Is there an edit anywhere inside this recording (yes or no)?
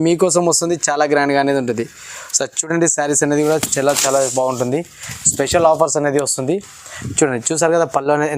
no